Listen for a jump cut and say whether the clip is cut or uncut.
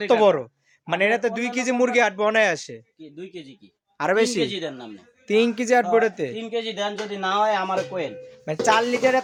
uncut